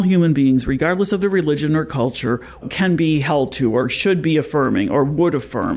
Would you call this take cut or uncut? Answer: cut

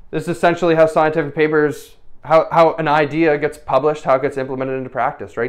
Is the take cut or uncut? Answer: uncut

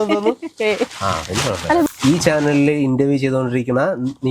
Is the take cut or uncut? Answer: cut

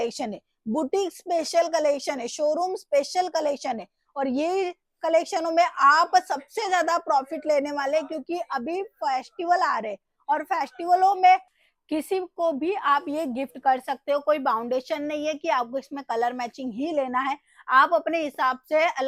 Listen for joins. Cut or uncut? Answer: uncut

